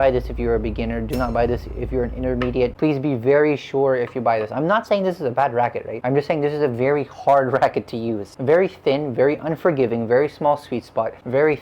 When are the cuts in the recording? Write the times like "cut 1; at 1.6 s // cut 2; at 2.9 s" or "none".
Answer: none